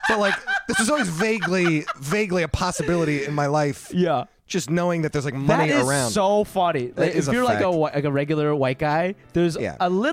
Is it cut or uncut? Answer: uncut